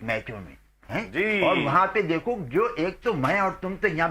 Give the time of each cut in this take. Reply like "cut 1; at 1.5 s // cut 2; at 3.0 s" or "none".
none